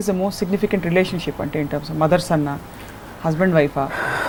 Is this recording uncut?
yes; 0 cuts

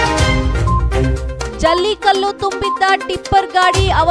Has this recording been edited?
yes; 1 cut; at 1.2 s

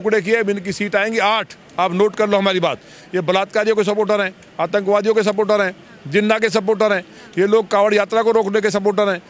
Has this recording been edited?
no; 0 cuts

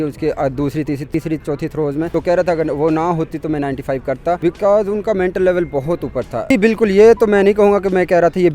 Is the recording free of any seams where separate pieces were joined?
no; 4 cuts; at 1.1 s, 2.1 s, 4.4 s, 6.5 s

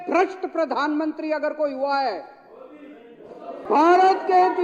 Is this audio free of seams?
no; 1 cut; at 3.6 s

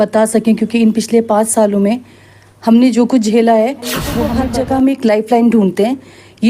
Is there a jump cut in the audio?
yes; 1 cut; at 4.3 s

